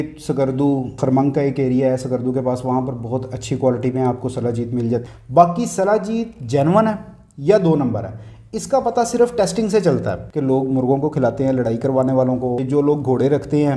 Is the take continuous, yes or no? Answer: no